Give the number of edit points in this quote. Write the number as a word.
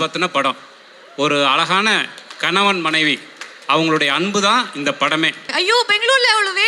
one